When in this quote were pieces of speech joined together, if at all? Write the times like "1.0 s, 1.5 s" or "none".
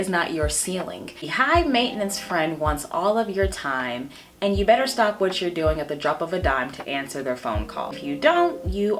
1.3 s, 8.0 s